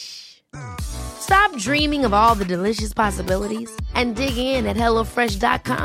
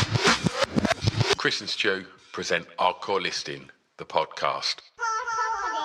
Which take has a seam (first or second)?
second